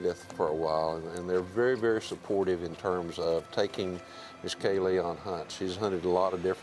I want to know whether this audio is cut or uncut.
uncut